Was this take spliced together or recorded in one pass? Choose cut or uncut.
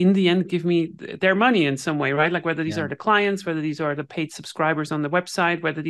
uncut